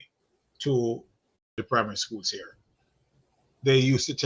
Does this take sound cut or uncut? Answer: cut